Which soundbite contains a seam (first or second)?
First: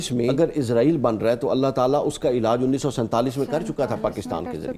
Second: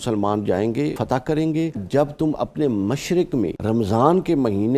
second